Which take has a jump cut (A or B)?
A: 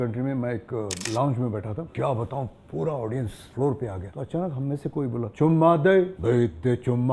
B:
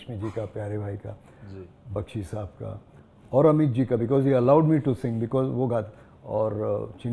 A